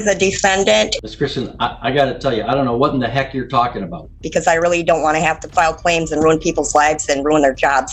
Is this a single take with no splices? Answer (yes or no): no